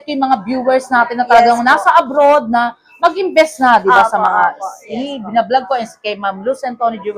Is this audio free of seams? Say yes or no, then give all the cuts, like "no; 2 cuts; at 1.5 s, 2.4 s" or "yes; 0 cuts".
yes; 0 cuts